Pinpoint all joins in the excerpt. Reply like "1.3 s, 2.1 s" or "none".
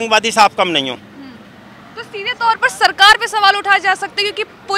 none